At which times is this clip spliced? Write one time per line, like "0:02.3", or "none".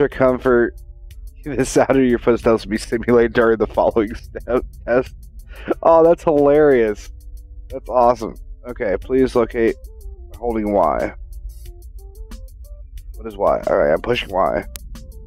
0:04.7